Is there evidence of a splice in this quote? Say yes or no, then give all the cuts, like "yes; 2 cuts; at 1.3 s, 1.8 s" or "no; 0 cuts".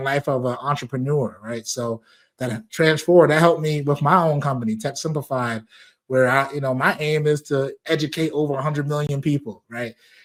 no; 0 cuts